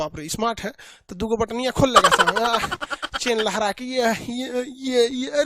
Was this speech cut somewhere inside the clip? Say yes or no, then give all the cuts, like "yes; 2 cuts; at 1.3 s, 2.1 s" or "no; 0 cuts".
no; 0 cuts